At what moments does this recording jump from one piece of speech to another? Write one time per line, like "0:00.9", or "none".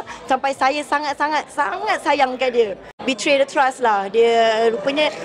0:03.0